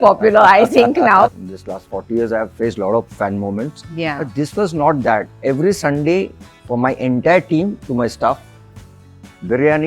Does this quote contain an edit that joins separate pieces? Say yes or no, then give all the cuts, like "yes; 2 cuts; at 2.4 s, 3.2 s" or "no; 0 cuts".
yes; 2 cuts; at 1.4 s, 5.3 s